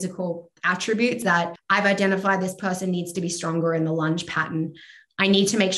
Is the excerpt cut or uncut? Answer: cut